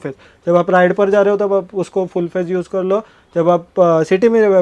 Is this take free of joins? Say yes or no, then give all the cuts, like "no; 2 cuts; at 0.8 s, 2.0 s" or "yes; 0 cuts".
yes; 0 cuts